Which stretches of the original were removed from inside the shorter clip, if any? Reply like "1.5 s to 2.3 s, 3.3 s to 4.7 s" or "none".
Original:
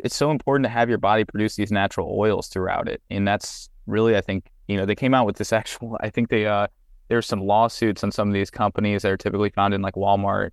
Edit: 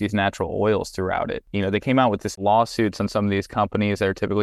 3.0 s to 4.6 s, 5.5 s to 7.4 s